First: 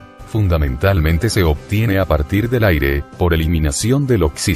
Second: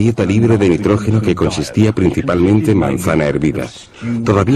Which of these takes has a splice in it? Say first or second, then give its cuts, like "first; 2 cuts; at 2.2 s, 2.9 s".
first; 1 cut; at 2.5 s